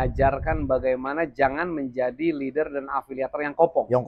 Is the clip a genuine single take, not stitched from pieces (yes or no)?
yes